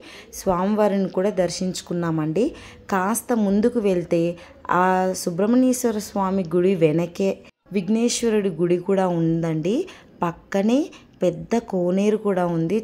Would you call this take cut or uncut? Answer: uncut